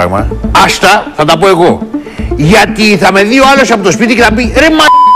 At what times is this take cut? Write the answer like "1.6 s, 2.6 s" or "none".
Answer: none